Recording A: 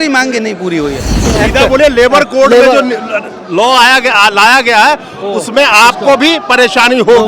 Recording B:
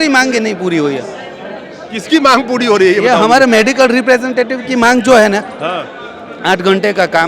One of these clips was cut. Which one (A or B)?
A